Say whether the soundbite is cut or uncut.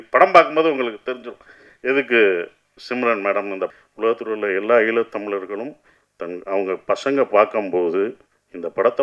cut